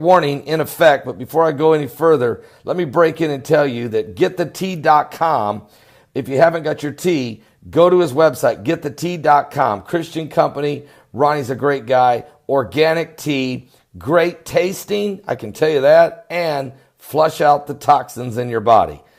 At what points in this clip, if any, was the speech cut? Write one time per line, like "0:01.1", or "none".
0:11.8